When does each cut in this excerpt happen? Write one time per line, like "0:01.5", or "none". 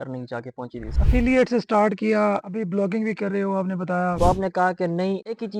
0:00.9
0:04.2

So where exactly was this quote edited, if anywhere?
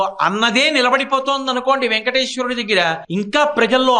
0:03.0

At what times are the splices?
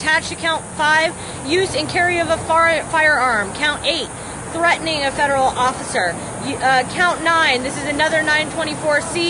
0:03.4

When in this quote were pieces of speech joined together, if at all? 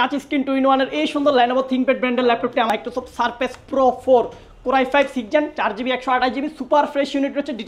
0:02.7

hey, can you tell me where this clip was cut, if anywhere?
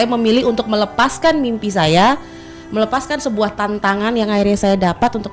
none

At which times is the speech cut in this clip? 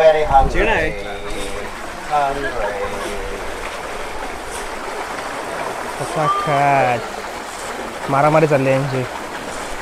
none

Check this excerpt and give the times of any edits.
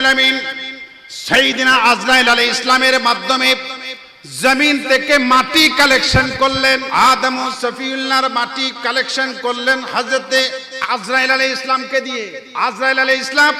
0:06.9
0:12.4

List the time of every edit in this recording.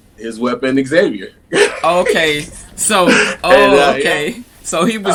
none

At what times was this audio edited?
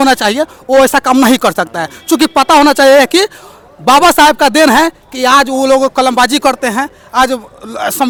none

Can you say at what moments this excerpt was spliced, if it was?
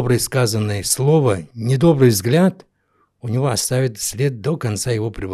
0:01.5

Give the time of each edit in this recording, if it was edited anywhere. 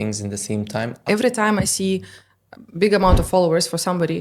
0:01.0

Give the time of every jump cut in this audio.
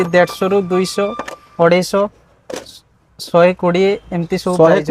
none

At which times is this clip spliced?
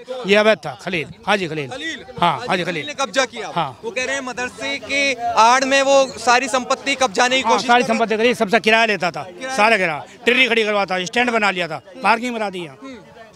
none

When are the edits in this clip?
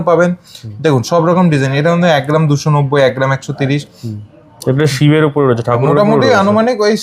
none

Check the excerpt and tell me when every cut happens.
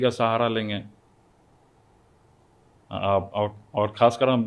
none

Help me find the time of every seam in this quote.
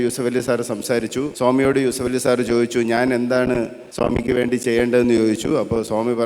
0:01.3
0:03.8

